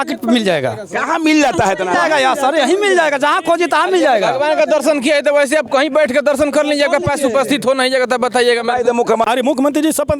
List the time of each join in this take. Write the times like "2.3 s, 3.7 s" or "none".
9.2 s